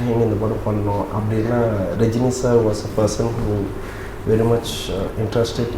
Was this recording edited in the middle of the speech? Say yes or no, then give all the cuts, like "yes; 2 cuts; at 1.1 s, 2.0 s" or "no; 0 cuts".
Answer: no; 0 cuts